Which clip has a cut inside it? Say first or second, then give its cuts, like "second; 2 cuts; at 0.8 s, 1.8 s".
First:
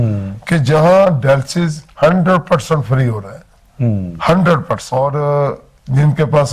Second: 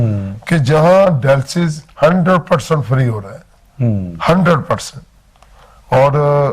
first; 1 cut; at 4.8 s